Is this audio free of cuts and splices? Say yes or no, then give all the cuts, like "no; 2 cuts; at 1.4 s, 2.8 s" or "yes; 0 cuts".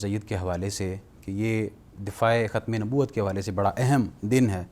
yes; 0 cuts